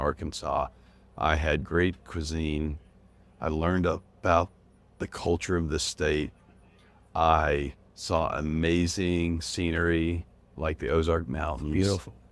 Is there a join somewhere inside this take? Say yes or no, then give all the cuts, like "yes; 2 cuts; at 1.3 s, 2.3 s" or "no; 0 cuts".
yes; 1 cut; at 3.2 s